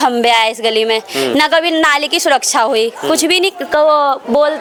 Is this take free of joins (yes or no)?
yes